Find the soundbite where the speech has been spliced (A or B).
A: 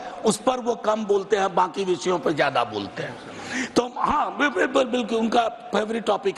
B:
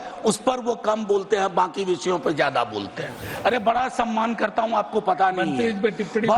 B